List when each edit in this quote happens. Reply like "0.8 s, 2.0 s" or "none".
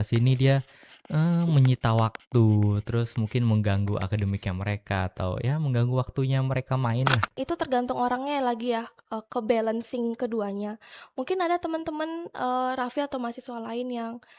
7.3 s